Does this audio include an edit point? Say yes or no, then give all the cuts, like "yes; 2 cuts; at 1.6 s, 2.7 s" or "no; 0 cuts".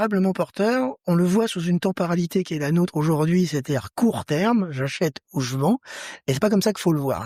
no; 0 cuts